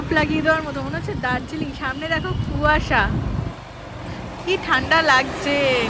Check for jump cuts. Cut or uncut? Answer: uncut